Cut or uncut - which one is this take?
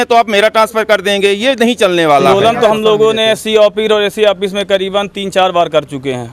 cut